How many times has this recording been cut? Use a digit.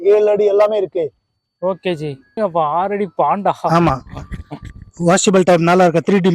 1